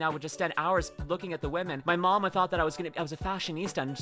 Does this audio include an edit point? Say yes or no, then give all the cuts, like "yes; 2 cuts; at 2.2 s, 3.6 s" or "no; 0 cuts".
yes; 1 cut; at 1.8 s